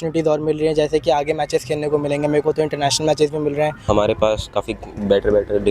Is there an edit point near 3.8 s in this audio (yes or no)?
yes